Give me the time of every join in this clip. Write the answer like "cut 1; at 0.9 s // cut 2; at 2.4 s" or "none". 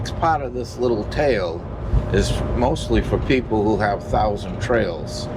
none